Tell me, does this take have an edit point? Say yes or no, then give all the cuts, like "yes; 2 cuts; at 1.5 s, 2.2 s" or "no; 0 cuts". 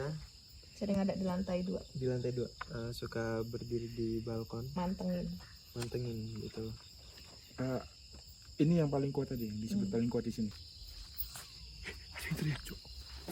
yes; 1 cut; at 10.5 s